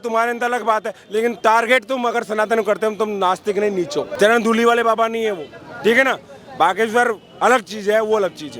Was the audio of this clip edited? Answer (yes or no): yes